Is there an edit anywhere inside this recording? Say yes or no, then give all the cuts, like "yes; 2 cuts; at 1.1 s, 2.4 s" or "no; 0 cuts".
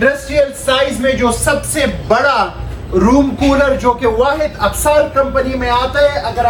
no; 0 cuts